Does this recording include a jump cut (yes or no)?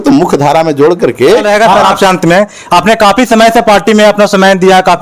yes